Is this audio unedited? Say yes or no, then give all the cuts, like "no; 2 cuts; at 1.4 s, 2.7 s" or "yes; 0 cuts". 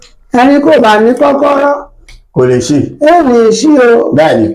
yes; 0 cuts